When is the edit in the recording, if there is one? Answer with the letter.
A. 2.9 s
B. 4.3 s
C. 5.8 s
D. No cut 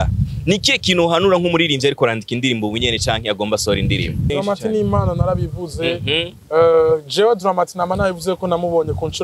B